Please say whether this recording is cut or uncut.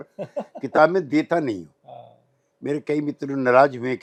uncut